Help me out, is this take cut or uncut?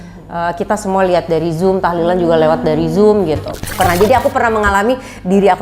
cut